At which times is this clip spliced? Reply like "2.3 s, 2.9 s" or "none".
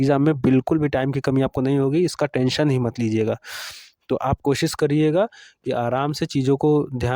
none